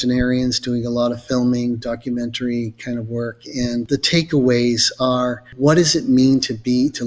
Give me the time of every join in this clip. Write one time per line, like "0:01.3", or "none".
0:03.8
0:05.4